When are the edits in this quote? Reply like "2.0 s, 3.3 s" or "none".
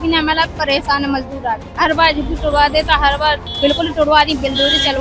1.7 s, 3.5 s